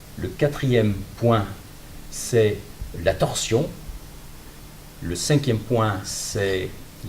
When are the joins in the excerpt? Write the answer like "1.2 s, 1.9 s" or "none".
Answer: 2.5 s